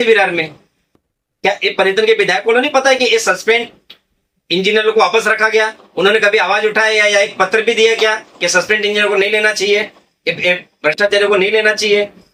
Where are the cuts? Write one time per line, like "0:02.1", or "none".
none